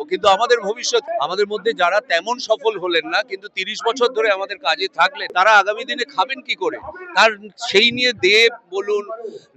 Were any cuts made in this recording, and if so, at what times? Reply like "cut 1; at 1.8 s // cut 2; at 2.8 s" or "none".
cut 1; at 1.1 s // cut 2; at 5.2 s